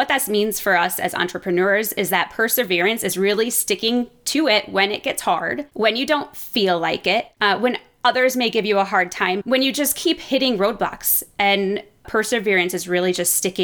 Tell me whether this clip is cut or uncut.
cut